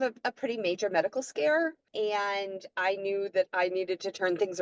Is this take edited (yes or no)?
no